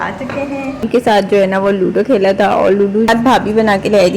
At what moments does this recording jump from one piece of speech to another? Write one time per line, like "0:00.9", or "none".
0:01.2
0:03.1